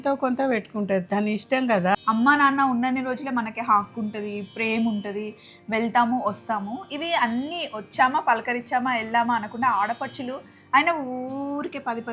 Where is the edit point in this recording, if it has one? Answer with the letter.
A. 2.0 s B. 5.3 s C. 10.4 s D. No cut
A